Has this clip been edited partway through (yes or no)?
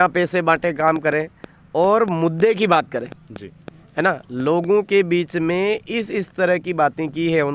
no